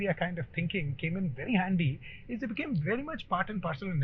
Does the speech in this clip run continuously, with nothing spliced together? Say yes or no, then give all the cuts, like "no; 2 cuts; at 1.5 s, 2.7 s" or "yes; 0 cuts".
yes; 0 cuts